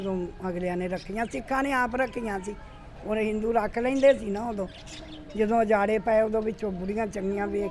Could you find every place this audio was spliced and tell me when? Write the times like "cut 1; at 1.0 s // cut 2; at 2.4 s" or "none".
none